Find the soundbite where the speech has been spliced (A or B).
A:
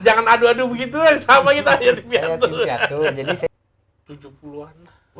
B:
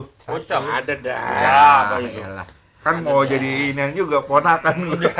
A